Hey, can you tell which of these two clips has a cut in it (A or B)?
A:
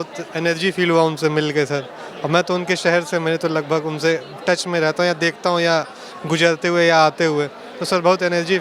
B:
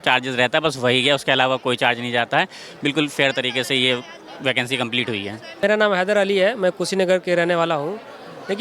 B